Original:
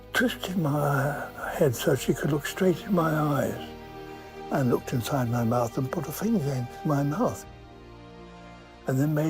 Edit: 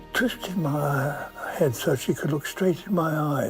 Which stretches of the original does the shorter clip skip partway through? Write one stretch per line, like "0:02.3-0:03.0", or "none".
none